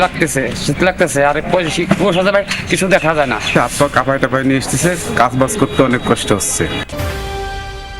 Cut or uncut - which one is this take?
cut